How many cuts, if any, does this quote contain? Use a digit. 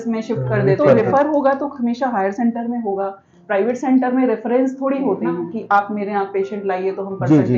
2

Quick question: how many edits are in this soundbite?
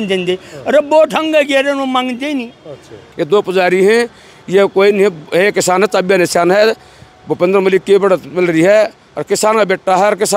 1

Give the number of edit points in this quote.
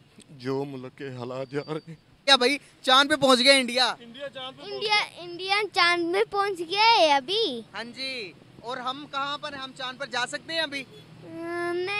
1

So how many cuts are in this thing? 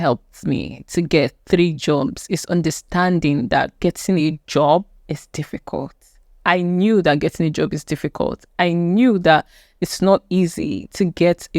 0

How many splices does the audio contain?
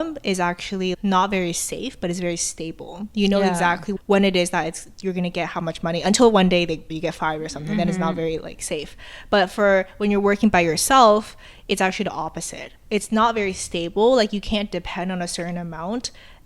1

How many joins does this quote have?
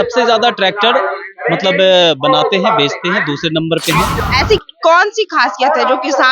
1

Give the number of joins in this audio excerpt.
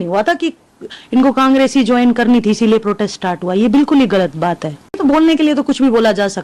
1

